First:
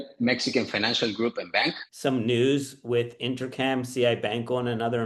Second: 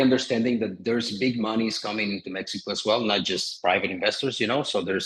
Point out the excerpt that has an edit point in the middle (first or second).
first